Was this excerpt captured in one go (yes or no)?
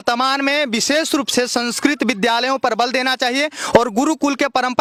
yes